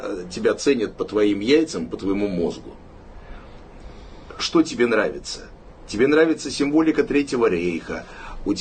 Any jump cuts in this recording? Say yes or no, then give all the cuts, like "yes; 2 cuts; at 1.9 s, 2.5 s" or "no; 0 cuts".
no; 0 cuts